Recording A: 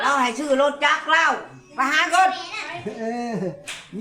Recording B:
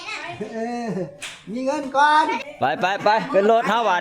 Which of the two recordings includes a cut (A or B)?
B